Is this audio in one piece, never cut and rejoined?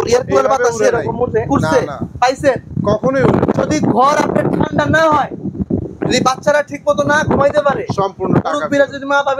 yes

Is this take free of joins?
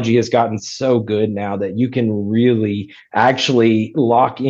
yes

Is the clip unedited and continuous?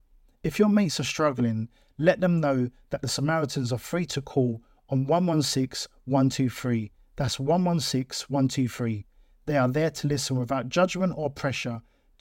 yes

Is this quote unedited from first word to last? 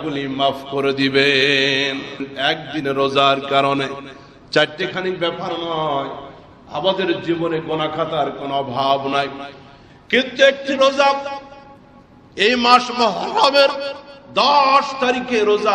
no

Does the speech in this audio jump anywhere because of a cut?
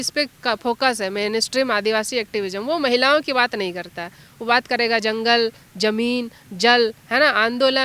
no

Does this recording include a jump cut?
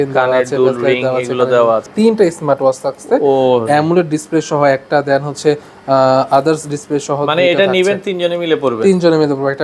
yes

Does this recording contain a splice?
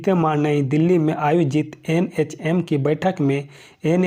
no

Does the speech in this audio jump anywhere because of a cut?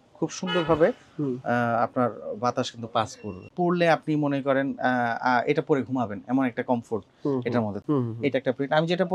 yes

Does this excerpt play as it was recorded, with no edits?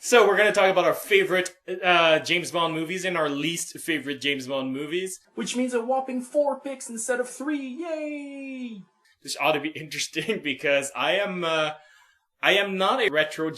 no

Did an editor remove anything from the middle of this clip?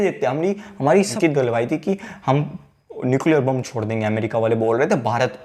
yes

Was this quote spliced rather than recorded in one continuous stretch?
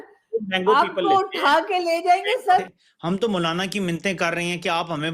yes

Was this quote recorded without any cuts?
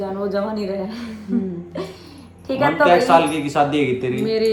yes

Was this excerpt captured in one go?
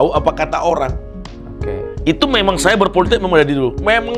yes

